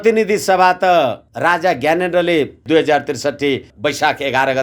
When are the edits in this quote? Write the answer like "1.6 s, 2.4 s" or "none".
1.3 s, 2.6 s, 3.7 s